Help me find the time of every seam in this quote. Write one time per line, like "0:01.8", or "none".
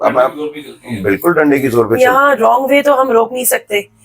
none